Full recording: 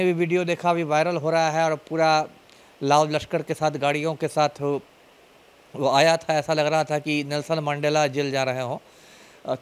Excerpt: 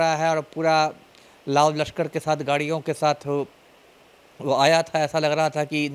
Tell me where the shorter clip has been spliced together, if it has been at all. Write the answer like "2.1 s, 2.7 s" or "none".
none